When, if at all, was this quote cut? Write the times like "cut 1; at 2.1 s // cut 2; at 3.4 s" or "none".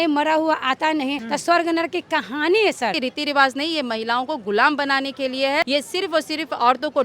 cut 1; at 1.2 s // cut 2; at 3.0 s // cut 3; at 5.7 s